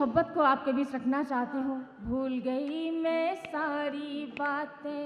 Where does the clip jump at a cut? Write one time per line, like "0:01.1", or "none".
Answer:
0:01.9